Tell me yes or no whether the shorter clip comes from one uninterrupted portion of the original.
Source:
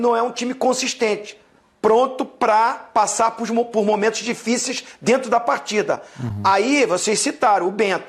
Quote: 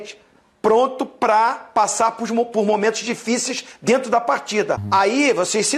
no